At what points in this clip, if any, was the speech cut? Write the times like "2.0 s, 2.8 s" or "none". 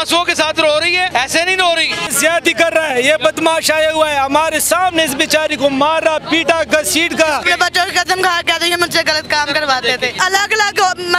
1.1 s, 2.1 s, 7.4 s, 10.2 s